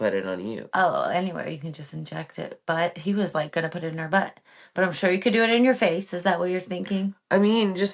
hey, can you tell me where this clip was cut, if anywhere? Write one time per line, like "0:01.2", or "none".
none